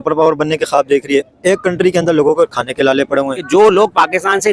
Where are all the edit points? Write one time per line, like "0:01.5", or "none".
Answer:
0:03.4